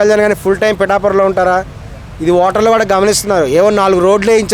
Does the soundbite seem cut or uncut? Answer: uncut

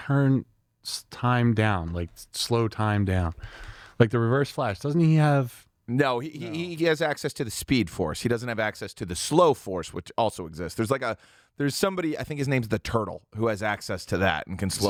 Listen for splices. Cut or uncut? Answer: uncut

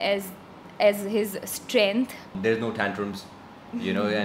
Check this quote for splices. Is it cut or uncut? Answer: cut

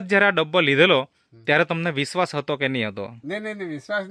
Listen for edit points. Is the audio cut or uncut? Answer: uncut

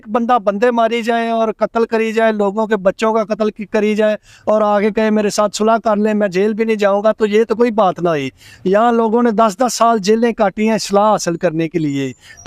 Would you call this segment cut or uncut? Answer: uncut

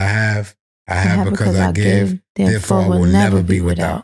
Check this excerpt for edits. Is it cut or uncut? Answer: uncut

